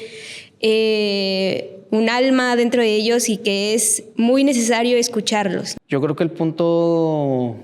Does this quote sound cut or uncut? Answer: cut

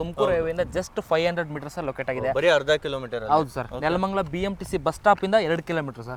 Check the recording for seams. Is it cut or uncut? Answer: uncut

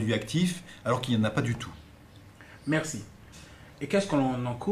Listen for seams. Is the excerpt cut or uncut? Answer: cut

